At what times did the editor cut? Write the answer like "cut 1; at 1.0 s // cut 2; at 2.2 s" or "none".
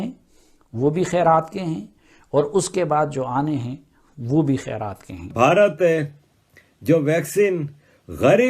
cut 1; at 5.3 s

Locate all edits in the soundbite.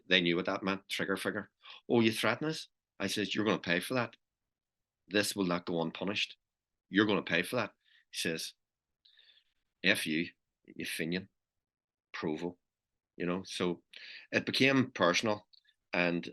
none

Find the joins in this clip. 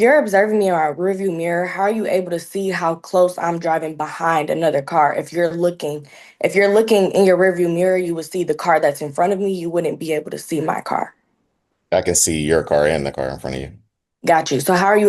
none

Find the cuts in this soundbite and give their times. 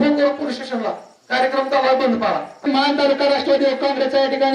cut 1; at 2.7 s

